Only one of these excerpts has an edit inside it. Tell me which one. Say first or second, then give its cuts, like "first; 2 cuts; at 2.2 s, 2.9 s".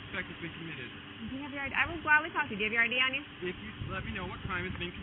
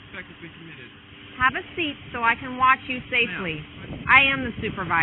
second; 2 cuts; at 1.1 s, 3.9 s